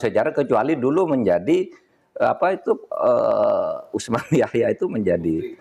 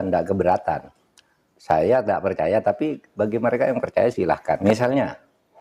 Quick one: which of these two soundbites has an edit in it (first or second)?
second